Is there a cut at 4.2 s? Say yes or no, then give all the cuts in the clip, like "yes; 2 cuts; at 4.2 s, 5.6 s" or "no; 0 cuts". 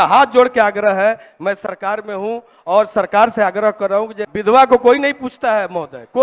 yes; 1 cut; at 4.2 s